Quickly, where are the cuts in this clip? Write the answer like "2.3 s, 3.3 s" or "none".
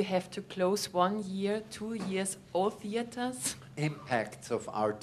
3.4 s